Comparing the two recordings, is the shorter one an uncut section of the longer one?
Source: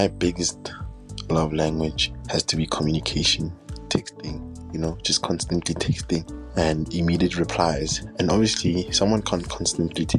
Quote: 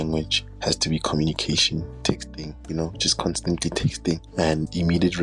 no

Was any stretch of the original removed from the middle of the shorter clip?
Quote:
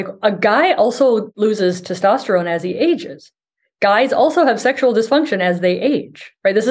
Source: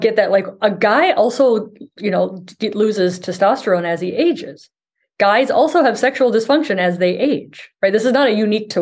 yes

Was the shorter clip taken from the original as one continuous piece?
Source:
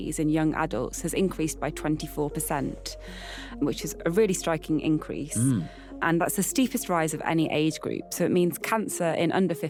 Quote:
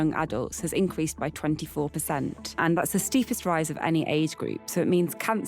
no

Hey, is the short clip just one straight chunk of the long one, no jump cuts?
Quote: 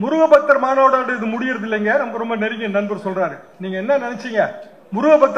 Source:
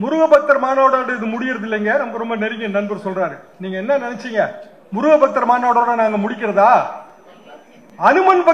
yes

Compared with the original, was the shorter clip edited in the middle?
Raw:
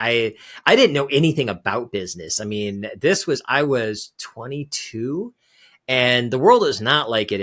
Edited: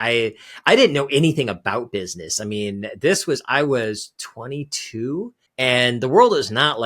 yes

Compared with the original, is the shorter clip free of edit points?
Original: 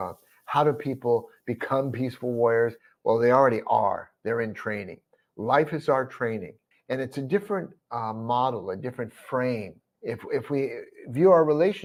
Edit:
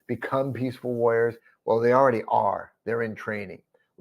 yes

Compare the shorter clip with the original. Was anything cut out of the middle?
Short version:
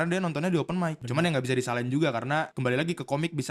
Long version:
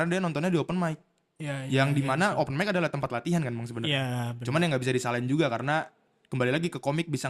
yes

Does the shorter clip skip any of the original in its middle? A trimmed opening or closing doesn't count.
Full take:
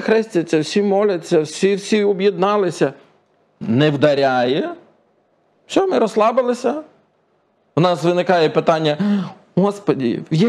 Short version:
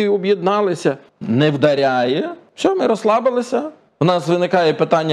yes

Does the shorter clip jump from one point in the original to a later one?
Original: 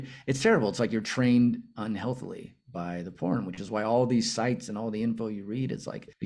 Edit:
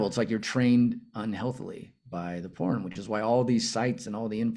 no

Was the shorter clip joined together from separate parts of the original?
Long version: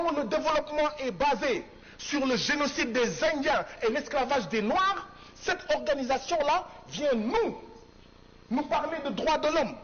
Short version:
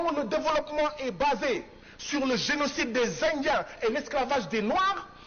no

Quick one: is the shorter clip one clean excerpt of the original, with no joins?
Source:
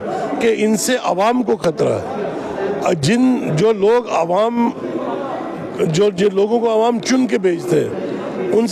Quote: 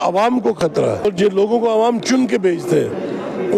no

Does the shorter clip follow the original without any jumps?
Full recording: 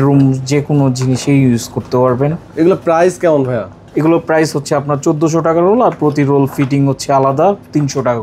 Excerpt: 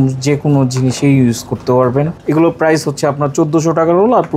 no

